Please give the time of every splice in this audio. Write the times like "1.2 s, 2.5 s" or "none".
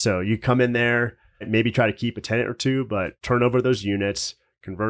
1.5 s, 3.2 s